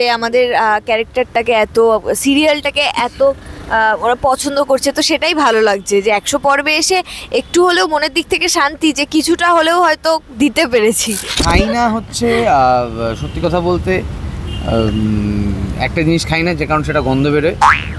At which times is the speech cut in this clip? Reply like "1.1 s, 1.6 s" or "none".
11.4 s